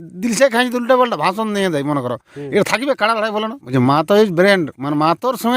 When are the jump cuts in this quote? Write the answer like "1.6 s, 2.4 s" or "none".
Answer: 3.6 s